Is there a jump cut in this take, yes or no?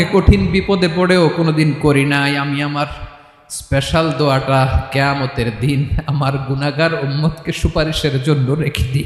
no